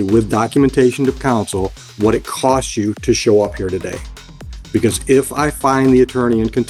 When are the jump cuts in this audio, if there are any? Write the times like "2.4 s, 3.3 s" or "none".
none